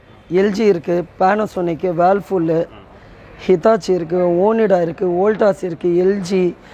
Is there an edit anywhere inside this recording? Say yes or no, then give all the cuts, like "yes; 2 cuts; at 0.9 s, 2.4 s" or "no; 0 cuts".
no; 0 cuts